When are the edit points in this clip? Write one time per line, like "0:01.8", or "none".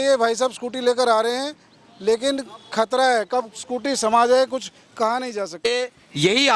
0:05.5